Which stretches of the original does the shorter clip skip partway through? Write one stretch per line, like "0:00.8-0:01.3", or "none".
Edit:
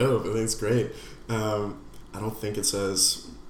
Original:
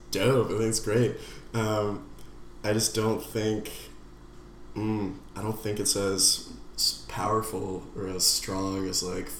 0:02.3-0:05.3